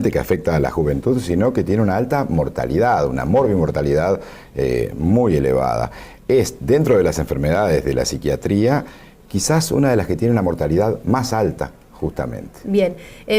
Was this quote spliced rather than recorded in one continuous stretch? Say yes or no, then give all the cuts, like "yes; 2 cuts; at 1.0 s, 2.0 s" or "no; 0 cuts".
yes; 1 cut; at 8.7 s